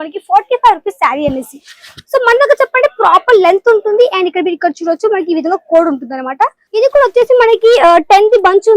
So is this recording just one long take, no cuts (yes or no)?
no